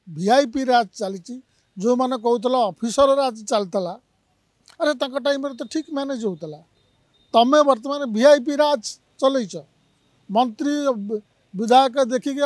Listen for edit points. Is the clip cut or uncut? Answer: uncut